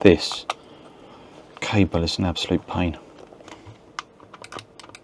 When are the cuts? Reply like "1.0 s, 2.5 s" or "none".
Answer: 3.4 s